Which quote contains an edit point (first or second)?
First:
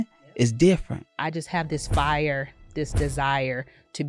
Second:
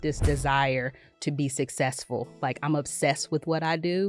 first